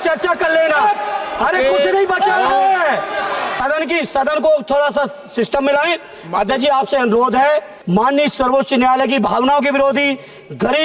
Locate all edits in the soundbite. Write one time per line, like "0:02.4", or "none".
0:03.6
0:07.8